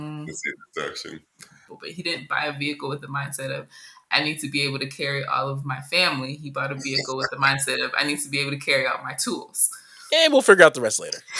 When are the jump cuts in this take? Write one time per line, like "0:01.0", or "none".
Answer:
0:01.6